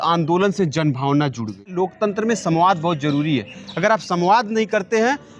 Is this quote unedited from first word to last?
no; 1 cut; at 1.7 s

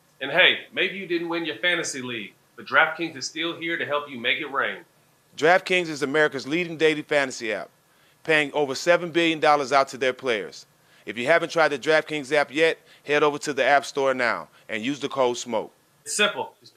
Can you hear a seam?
no; 0 cuts

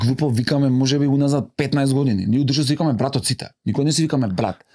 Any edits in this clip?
no; 0 cuts

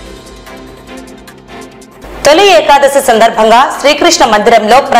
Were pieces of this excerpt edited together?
yes; 1 cut; at 1.5 s

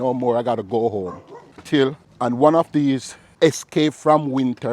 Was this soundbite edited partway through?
yes; 2 cuts; at 1.9 s, 3.2 s

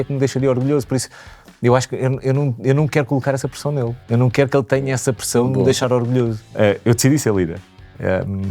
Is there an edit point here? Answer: yes; 1 cut; at 6.5 s

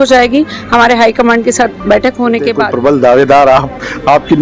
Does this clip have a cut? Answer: yes; 1 cut; at 2.7 s

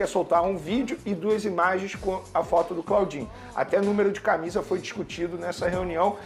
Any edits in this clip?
no; 0 cuts

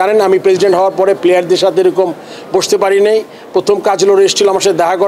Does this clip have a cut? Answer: no; 0 cuts

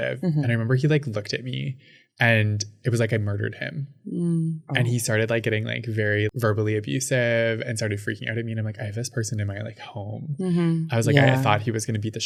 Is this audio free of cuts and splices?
yes; 0 cuts

